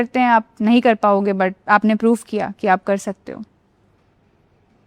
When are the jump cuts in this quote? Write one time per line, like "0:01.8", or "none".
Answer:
0:01.6